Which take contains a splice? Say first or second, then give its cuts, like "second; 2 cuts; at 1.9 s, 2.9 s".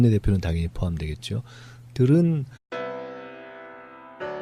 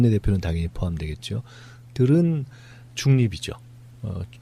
second; 1 cut; at 2.6 s